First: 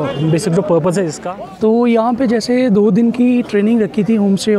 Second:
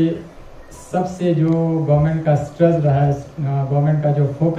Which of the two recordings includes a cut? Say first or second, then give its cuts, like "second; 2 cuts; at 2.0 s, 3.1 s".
first; 1 cut; at 1.2 s